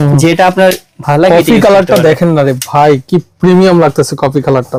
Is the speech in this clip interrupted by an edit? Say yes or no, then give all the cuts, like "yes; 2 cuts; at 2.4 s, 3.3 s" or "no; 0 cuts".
no; 0 cuts